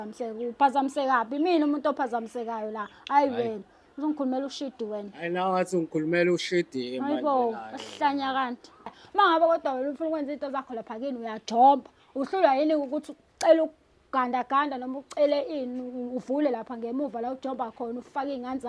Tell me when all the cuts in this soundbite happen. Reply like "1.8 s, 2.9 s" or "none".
8.9 s